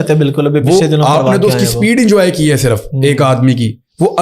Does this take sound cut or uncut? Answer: uncut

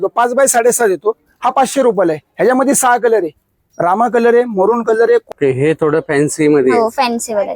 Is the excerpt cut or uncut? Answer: cut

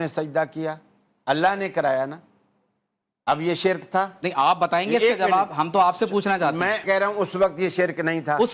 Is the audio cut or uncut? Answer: cut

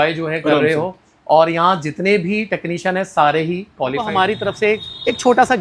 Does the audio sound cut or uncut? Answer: cut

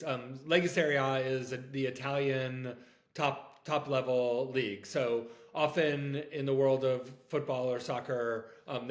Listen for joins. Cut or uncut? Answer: uncut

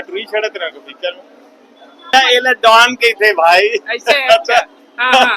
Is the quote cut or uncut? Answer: cut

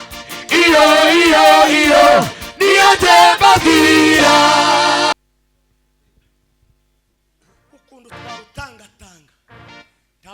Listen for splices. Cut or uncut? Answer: cut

